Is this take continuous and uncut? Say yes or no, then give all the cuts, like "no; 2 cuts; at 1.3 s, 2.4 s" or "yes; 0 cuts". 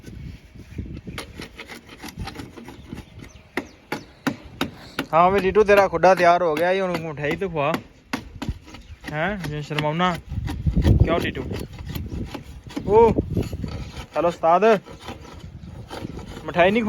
yes; 0 cuts